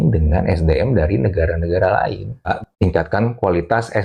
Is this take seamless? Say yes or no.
no